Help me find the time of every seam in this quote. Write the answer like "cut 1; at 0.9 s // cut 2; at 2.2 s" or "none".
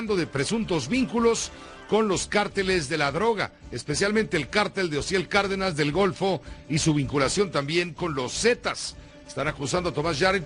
cut 1; at 2.9 s